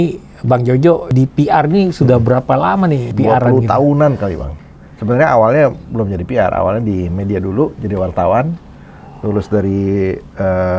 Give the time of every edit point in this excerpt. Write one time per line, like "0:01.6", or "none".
0:01.1
0:03.1
0:04.5